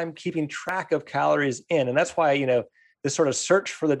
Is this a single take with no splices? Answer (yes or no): yes